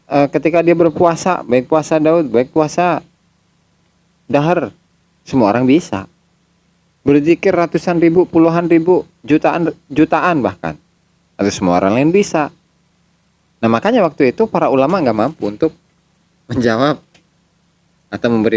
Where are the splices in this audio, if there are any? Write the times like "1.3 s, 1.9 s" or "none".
none